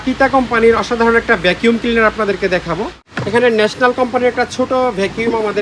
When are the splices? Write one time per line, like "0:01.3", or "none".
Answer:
0:03.0